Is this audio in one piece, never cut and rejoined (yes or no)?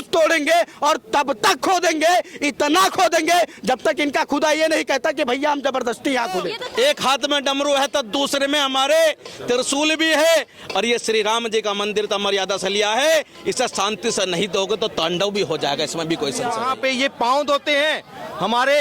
no